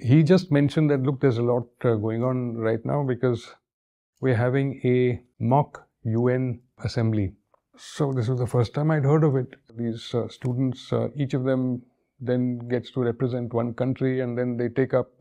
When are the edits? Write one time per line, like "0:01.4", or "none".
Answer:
0:05.3
0:06.8
0:07.8
0:09.8